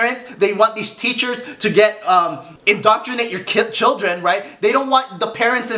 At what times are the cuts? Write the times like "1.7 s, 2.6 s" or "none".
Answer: 2.5 s